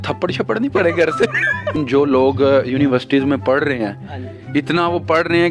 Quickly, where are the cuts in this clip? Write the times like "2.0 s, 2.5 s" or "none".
1.8 s